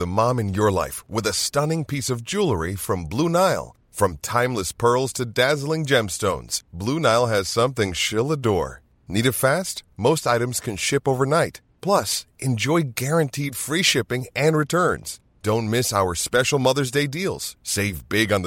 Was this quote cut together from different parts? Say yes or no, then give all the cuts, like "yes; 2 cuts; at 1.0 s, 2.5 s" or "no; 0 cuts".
no; 0 cuts